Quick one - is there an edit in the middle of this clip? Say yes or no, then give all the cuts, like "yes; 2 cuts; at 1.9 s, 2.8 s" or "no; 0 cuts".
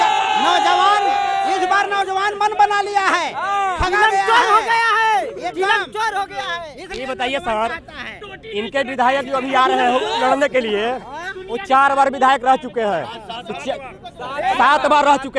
no; 0 cuts